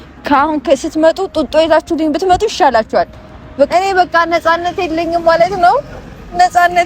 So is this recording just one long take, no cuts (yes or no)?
no